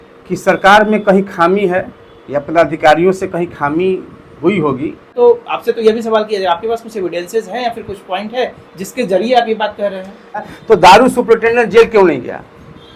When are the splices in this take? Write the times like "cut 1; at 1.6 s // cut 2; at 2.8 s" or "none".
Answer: cut 1; at 5.1 s // cut 2; at 10.5 s